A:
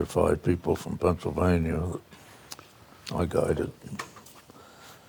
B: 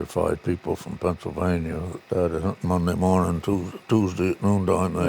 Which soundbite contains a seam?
B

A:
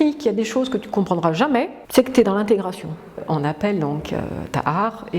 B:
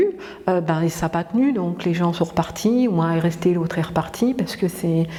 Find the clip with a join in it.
A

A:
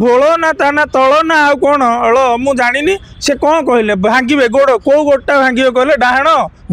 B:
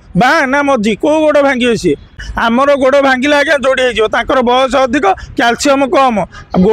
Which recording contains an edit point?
B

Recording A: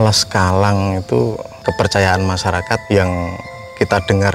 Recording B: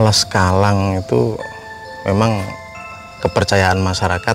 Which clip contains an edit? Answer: A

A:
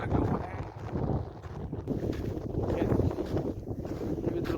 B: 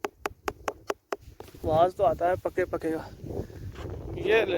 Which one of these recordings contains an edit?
A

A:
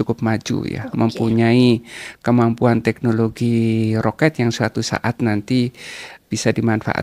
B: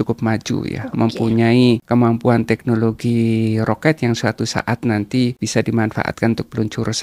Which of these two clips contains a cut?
B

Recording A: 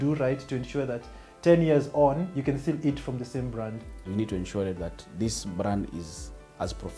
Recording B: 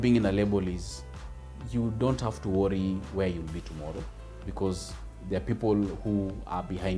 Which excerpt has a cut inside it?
A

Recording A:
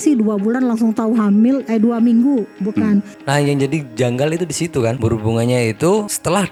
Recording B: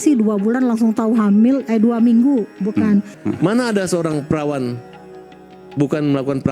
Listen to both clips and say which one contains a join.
B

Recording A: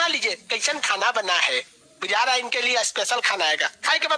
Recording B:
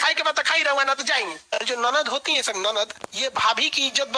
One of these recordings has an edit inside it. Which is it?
B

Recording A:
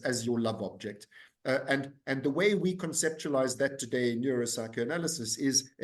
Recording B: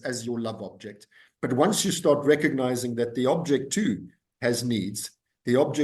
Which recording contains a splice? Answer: B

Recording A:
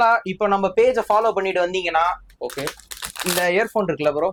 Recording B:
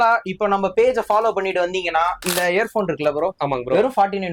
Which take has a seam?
B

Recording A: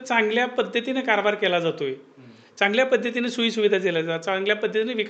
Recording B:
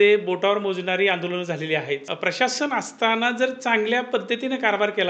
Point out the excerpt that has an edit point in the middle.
B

